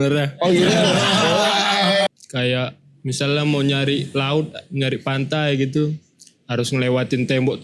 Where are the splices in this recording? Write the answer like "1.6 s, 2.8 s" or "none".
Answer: 2.1 s